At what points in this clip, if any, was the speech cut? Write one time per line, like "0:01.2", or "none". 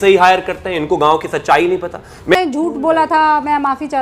0:02.6